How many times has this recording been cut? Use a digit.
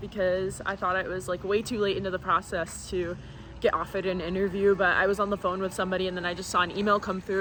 0